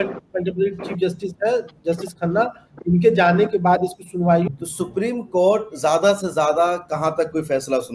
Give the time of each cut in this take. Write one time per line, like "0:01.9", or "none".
0:04.5